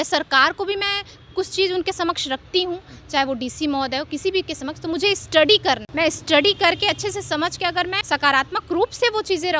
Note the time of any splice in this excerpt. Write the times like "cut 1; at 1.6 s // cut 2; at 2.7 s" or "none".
cut 1; at 5.9 s // cut 2; at 8.0 s